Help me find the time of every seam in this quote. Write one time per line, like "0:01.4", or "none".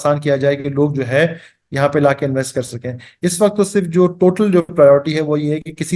none